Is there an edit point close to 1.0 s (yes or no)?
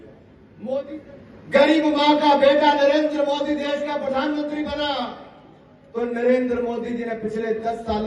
yes